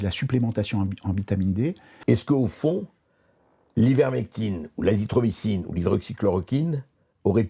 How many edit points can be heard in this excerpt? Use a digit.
1